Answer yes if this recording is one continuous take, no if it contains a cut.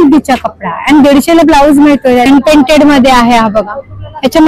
no